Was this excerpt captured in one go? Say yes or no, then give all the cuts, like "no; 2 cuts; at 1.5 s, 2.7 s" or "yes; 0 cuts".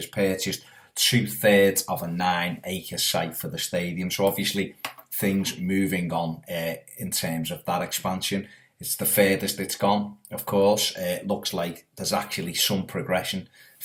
yes; 0 cuts